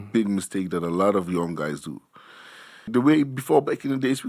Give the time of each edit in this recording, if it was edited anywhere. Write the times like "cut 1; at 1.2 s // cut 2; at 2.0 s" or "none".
cut 1; at 2.9 s